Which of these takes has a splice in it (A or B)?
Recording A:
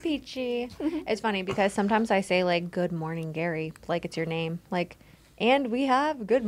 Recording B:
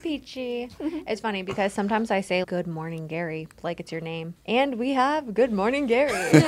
B